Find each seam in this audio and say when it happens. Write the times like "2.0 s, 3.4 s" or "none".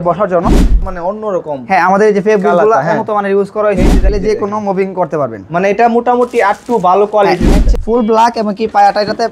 0.8 s, 4.1 s, 7.6 s